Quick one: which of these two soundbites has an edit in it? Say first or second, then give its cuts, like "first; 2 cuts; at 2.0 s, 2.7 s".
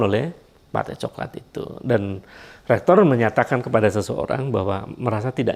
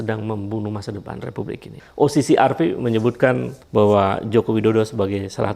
second; 2 cuts; at 1.8 s, 3.5 s